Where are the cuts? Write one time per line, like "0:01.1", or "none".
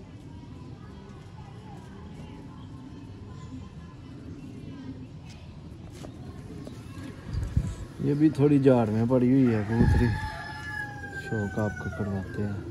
none